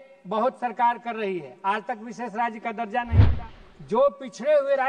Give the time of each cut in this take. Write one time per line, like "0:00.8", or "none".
0:03.2